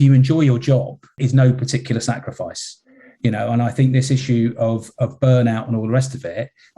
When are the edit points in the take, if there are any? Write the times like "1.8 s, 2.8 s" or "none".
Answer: 1.1 s